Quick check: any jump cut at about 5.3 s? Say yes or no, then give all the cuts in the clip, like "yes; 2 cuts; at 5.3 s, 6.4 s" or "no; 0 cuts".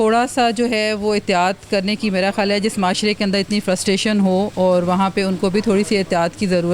no; 0 cuts